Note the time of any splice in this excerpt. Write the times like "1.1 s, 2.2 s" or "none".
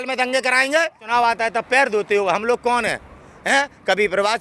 1.0 s